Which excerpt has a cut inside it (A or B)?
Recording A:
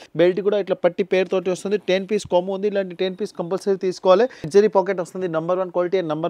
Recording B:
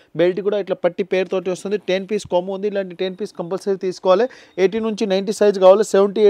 A